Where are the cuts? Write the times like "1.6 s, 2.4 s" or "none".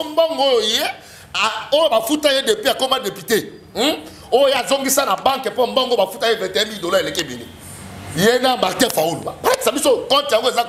none